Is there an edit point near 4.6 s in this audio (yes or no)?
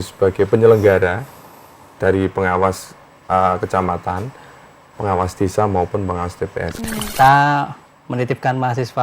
no